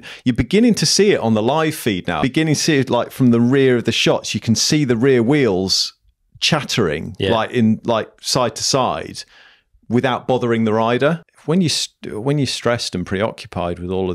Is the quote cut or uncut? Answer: cut